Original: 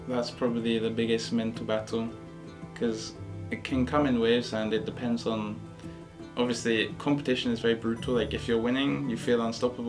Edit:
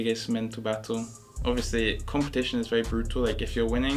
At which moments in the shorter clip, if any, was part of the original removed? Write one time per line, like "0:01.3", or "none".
0:01.2